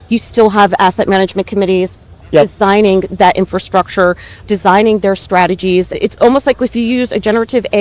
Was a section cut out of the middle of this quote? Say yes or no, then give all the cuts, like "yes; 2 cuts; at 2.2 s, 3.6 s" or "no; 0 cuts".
yes; 3 cuts; at 2.3 s, 4.4 s, 5.9 s